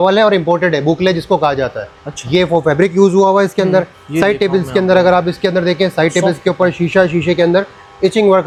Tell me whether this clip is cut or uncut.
uncut